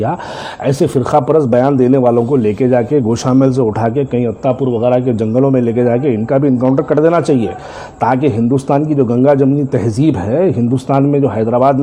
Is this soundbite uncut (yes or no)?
yes